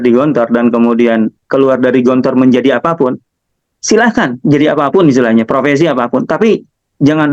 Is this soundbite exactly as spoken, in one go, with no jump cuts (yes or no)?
yes